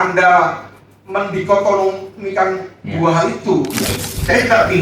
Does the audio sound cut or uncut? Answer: cut